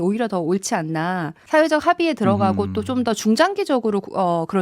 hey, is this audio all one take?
no; 1 cut; at 1.4 s

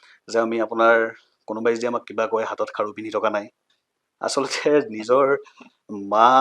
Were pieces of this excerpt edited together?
no; 0 cuts

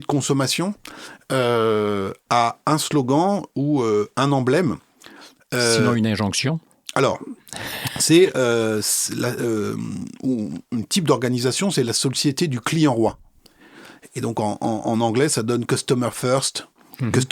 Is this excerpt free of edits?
yes; 0 cuts

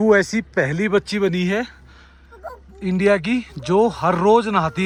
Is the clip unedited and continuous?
yes; 0 cuts

